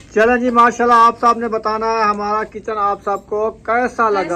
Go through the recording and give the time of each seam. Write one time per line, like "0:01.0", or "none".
none